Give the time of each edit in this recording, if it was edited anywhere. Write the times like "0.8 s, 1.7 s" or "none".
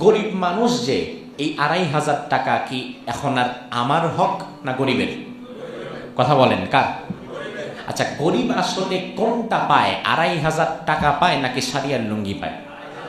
none